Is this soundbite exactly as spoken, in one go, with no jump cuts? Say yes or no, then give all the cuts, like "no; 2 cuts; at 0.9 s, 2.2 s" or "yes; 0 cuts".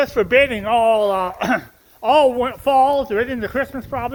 yes; 0 cuts